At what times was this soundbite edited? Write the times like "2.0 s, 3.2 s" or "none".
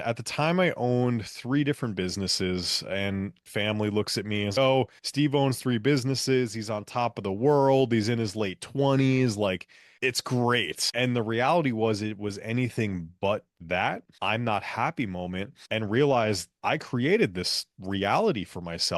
3.4 s, 14.1 s